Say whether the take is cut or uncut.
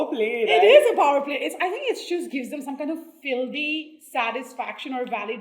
uncut